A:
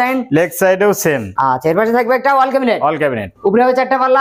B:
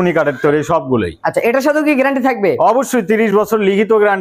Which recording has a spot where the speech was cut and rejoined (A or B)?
A